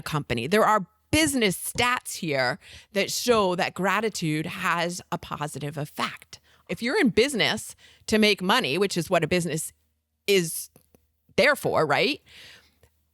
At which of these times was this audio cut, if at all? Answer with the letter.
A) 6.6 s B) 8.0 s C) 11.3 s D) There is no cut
A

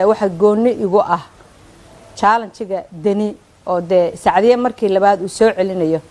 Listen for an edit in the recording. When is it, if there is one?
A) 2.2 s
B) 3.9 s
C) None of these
C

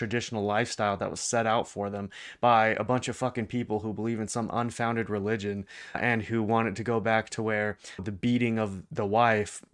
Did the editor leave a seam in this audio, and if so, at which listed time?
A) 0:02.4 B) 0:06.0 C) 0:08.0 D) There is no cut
C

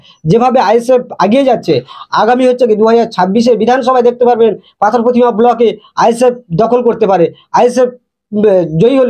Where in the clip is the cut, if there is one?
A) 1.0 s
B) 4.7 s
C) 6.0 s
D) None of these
D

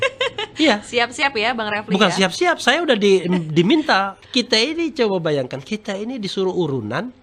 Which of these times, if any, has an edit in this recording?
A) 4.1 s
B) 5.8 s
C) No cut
A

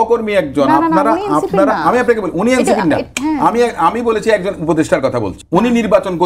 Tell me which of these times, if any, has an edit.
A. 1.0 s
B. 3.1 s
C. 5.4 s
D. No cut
C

